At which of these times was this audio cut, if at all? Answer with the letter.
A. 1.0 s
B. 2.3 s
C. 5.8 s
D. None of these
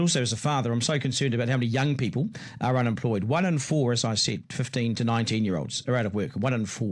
C